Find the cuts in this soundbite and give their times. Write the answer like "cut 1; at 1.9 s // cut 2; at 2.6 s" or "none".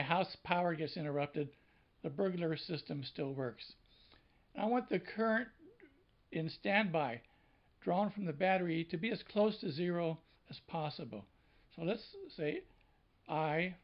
cut 1; at 4.5 s